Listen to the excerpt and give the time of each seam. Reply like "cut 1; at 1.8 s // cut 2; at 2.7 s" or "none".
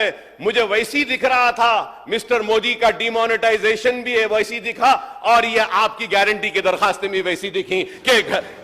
none